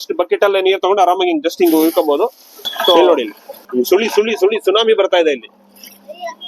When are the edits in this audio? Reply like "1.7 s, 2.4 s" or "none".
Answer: 3.0 s